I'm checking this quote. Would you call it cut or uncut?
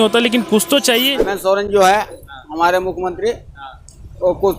cut